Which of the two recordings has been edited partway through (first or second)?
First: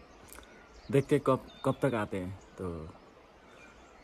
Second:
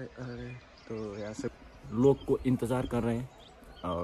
second